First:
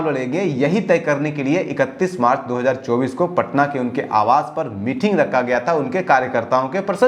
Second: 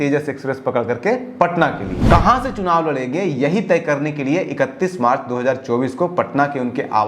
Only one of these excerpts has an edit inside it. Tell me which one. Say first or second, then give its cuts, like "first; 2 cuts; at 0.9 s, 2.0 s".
second; 1 cut; at 1.9 s